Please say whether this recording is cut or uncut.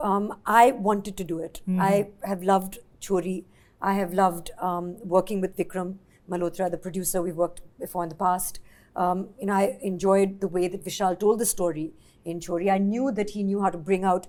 uncut